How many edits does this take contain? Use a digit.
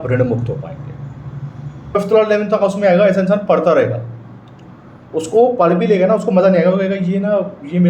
1